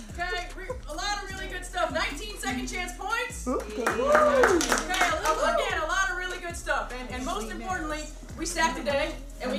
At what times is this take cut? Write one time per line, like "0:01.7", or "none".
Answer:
none